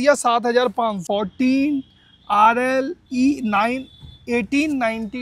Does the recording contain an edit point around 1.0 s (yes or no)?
yes